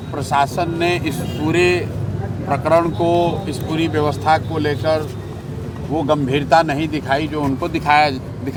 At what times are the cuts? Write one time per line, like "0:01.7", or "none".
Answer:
none